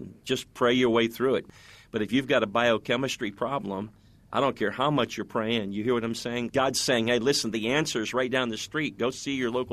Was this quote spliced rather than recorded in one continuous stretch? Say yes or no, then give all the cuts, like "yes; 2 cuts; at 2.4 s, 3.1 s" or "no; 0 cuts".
yes; 2 cuts; at 1.5 s, 6.5 s